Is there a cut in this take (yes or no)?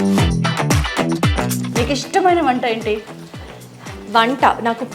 yes